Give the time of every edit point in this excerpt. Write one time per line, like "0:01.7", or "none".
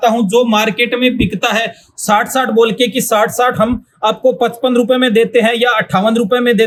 none